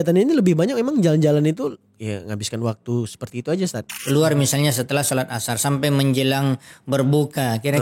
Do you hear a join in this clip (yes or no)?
yes